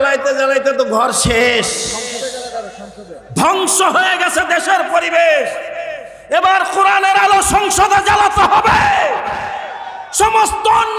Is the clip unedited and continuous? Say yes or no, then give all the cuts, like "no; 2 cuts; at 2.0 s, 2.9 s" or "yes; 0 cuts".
yes; 0 cuts